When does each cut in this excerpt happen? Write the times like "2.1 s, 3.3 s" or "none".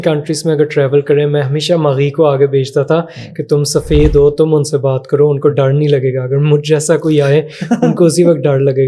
none